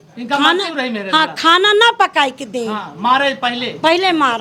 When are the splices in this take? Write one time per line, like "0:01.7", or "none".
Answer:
none